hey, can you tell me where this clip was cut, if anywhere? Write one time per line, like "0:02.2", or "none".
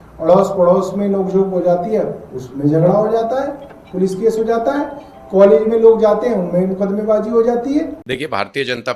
0:08.0